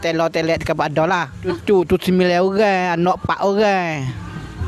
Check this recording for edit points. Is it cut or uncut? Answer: uncut